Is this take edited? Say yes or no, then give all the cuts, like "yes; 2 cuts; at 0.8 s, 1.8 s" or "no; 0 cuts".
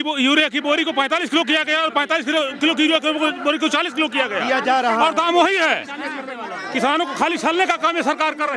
no; 0 cuts